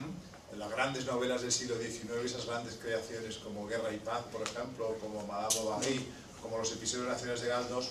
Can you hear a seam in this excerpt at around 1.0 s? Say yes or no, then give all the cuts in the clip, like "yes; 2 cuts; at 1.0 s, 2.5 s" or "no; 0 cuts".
yes; 1 cut; at 1.0 s